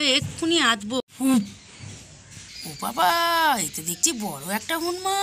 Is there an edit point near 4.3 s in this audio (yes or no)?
no